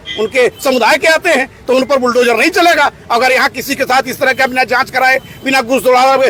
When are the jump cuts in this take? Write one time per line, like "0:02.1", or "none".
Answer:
none